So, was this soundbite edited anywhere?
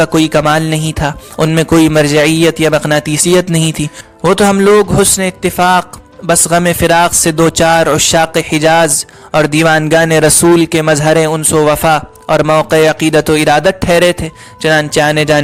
no; 0 cuts

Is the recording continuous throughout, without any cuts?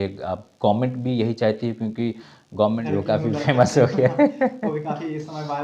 no; 1 cut; at 2.8 s

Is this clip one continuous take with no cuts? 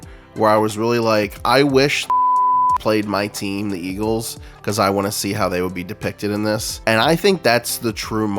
no; 1 cut; at 6.7 s

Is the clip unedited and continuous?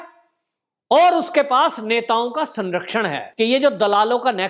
no; 1 cut; at 3.2 s

